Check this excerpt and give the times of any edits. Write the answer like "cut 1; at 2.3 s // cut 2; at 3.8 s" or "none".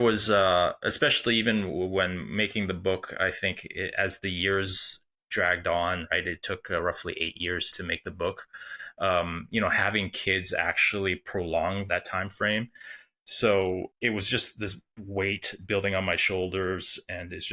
cut 1; at 7.7 s // cut 2; at 11.9 s // cut 3; at 13.9 s